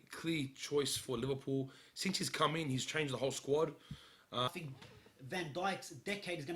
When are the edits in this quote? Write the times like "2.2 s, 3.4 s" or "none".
4.5 s